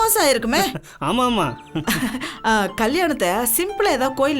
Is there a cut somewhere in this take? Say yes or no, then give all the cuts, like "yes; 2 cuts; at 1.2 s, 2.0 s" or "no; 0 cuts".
no; 0 cuts